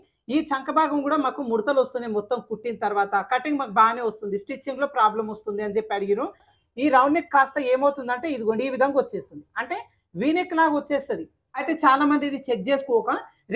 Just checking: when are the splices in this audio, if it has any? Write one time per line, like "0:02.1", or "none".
0:06.5
0:11.6